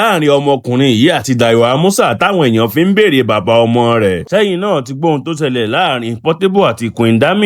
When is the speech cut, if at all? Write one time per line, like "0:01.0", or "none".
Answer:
0:04.2